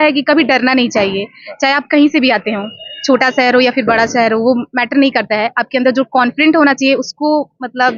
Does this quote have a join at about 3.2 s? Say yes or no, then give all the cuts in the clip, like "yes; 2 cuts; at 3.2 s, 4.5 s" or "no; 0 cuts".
no; 0 cuts